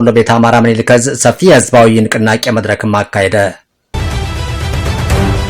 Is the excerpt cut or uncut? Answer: cut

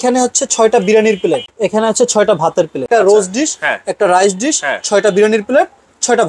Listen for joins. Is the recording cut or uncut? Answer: cut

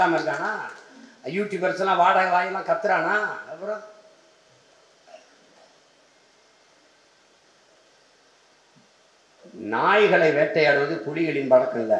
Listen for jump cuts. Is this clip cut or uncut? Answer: uncut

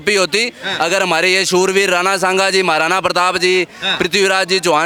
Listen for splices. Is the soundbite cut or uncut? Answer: uncut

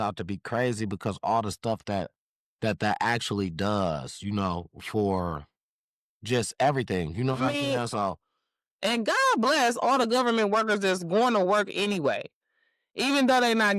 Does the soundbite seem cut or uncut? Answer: uncut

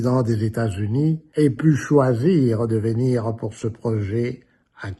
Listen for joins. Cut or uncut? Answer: cut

